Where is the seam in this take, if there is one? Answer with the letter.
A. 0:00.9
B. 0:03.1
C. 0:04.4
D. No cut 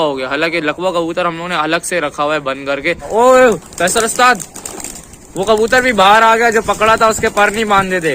B